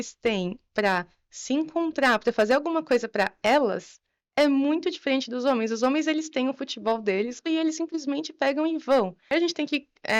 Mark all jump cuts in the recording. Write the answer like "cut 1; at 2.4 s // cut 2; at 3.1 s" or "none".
cut 1; at 7.4 s // cut 2; at 9.3 s